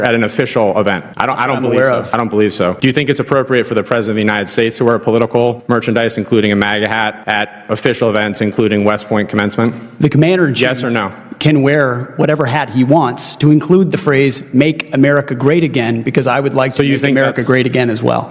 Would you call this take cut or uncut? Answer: cut